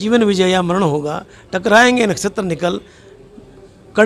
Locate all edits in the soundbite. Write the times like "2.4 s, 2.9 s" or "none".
none